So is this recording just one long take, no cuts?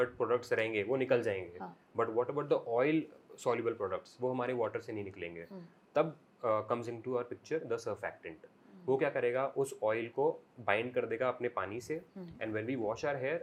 yes; 0 cuts

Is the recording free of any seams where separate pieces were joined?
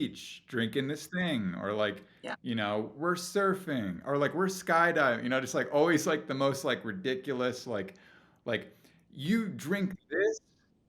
yes; 0 cuts

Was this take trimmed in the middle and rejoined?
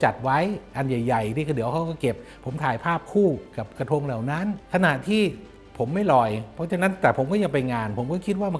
no; 0 cuts

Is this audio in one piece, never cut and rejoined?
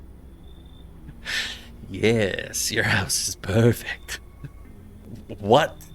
no; 1 cut; at 5.1 s

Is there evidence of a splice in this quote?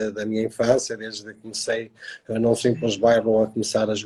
no; 0 cuts

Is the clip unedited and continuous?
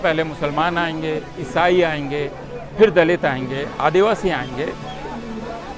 yes; 0 cuts

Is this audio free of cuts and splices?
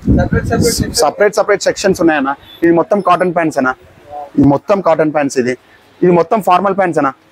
yes; 0 cuts

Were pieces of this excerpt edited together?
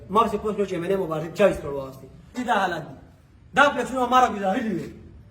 yes; 1 cut; at 2.4 s

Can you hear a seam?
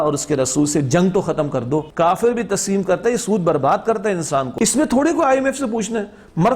yes; 2 cuts; at 1.9 s, 4.5 s

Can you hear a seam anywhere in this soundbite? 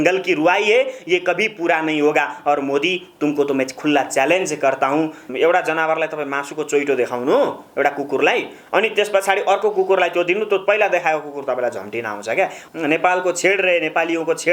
yes; 2 cuts; at 5.3 s, 12.6 s

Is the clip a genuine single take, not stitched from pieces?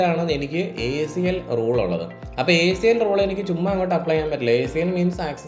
yes; 0 cuts

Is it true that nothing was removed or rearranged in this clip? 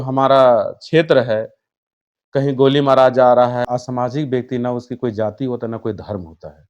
no; 1 cut; at 3.6 s

